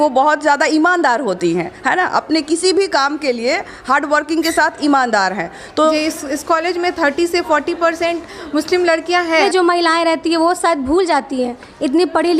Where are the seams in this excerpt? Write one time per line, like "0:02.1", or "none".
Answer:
0:05.9
0:09.4